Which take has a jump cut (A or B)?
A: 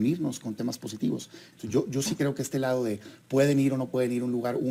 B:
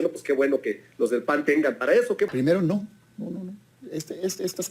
B